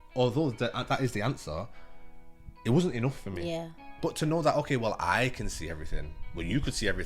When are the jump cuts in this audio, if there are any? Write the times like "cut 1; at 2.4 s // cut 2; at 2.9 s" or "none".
cut 1; at 4.0 s